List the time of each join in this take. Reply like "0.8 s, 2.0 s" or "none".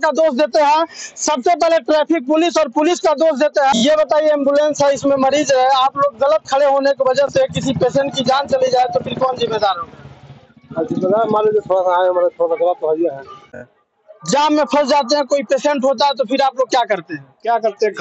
3.7 s, 13.6 s